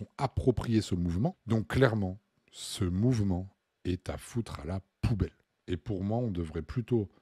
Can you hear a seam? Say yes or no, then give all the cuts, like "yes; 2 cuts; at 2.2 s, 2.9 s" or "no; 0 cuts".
yes; 2 cuts; at 1.4 s, 5.5 s